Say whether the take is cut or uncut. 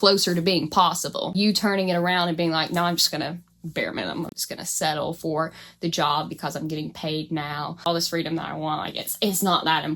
cut